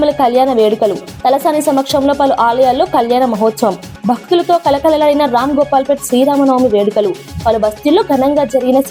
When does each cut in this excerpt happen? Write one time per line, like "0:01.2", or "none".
none